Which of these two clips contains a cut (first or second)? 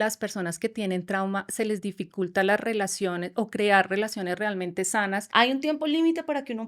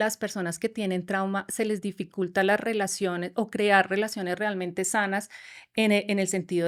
first